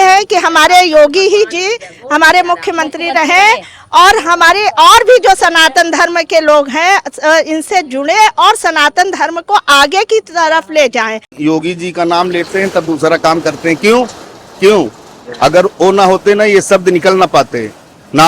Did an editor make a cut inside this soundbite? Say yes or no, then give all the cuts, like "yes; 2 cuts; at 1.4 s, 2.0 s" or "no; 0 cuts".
yes; 1 cut; at 11.3 s